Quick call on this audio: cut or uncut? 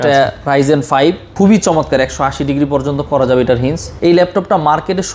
cut